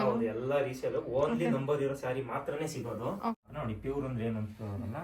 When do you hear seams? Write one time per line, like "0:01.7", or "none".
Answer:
0:03.5